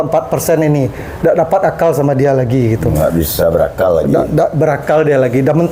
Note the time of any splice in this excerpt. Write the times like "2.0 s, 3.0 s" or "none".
none